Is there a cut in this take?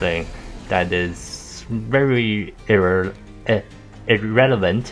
no; 0 cuts

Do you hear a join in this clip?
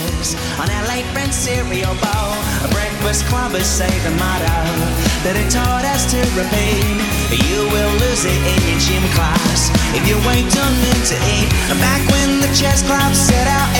no; 0 cuts

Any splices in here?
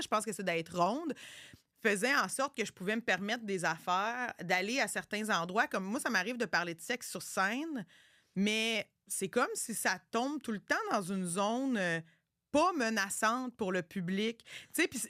no; 0 cuts

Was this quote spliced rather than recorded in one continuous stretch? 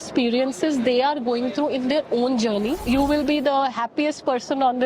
yes; 1 cut; at 2.8 s

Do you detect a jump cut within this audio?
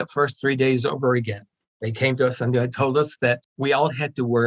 yes; 2 cuts; at 1.5 s, 3.5 s

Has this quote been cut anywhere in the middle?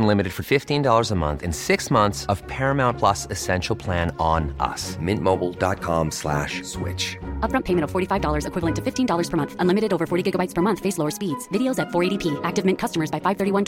no; 0 cuts

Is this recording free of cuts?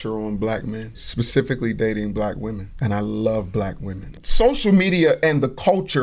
no; 3 cuts; at 1.0 s, 2.7 s, 4.1 s

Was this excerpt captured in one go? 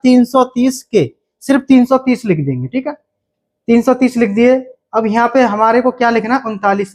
yes; 0 cuts

